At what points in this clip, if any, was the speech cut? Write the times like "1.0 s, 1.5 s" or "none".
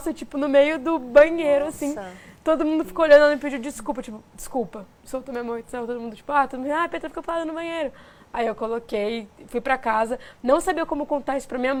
none